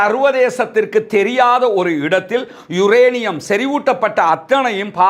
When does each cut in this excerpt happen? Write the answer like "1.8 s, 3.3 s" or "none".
none